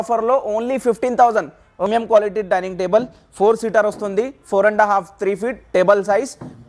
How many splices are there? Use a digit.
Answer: 1